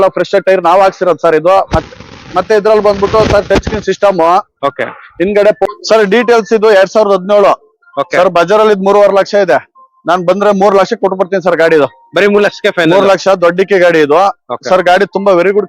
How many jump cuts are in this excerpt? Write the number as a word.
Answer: one